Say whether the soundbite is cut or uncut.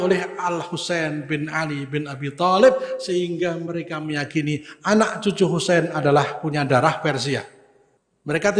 cut